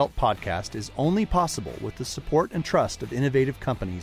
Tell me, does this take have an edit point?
no; 0 cuts

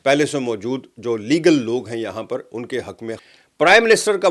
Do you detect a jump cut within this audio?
yes; 1 cut; at 3.2 s

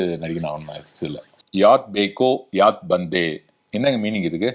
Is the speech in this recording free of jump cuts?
no; 1 cut; at 1.3 s

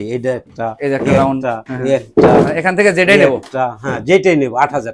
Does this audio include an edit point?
no; 0 cuts

